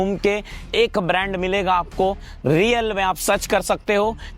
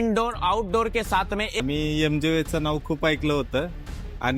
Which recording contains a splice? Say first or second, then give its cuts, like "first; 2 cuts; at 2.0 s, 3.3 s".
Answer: second; 1 cut; at 1.6 s